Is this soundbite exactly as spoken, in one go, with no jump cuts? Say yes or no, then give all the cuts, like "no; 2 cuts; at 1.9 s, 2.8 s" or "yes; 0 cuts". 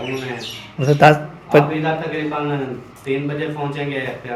yes; 0 cuts